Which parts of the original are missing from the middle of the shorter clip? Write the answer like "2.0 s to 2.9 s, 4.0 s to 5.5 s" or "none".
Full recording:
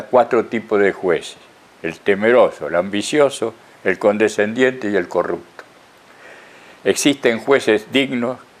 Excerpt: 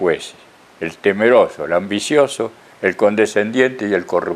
none